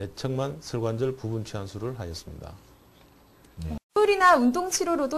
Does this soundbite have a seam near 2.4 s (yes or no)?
no